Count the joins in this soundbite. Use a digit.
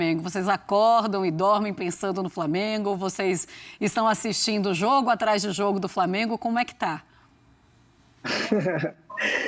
0